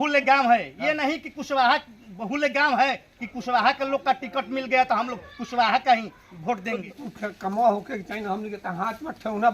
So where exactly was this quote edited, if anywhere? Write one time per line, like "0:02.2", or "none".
0:06.8